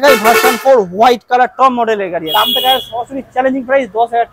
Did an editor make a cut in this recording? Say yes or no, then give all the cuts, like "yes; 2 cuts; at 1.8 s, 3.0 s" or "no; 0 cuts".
yes; 1 cut; at 2.2 s